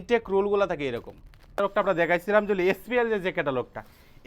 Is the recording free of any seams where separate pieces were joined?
no; 1 cut; at 1.6 s

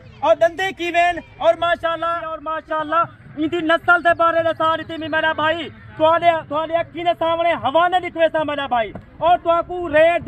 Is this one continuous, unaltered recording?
no; 1 cut; at 2.5 s

